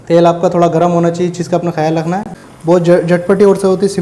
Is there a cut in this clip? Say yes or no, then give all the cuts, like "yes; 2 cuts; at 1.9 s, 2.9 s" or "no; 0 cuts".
yes; 1 cut; at 2.3 s